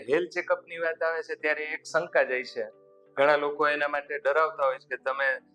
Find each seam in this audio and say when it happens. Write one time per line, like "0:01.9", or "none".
none